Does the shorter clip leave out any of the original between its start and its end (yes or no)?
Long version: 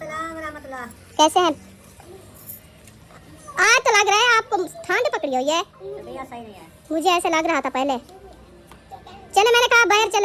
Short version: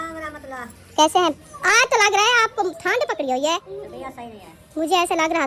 yes